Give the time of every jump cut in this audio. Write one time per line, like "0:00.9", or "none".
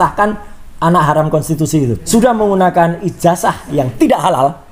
0:02.1